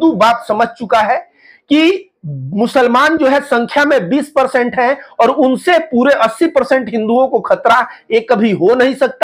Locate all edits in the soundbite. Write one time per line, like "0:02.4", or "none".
none